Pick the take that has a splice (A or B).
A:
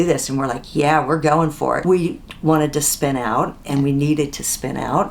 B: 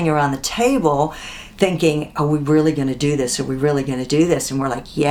A